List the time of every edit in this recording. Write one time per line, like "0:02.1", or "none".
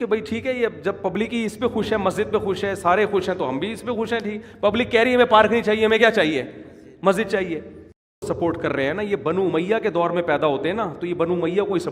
0:08.2